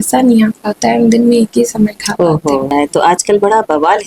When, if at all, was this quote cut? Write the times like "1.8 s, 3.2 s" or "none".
2.7 s